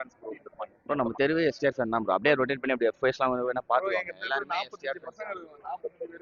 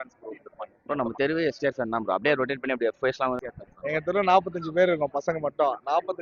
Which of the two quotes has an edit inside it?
second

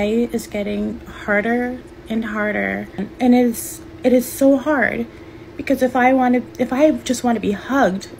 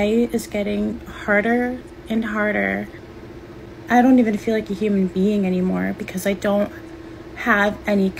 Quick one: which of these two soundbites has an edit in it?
second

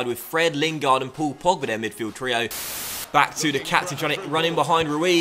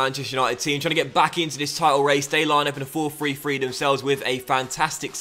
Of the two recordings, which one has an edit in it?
first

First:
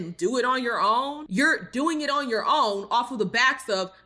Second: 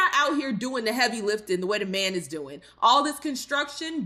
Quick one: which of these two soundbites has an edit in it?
first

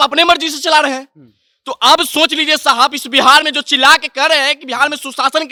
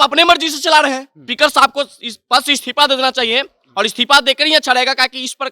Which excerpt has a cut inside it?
second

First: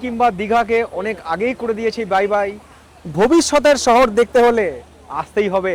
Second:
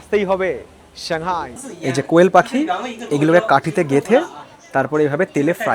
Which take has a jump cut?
second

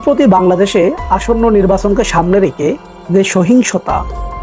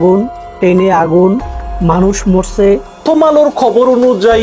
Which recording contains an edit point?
second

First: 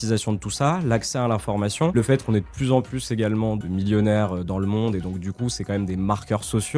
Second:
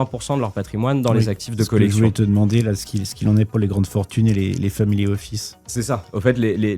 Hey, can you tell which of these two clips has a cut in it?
first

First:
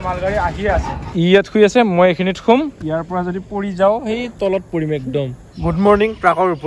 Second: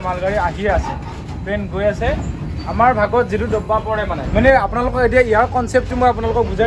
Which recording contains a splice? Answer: first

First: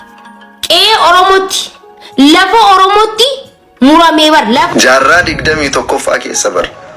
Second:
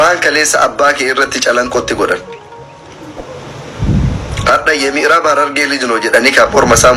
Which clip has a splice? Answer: first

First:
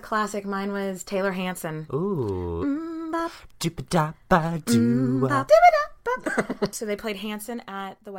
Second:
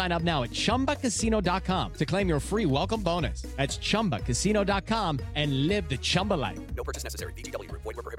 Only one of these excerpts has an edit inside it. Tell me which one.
first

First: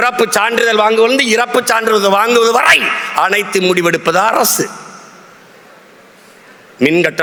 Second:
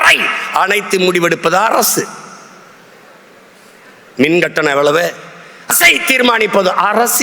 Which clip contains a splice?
second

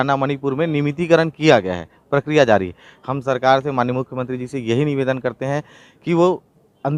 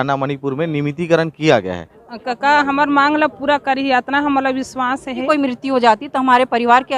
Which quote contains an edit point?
second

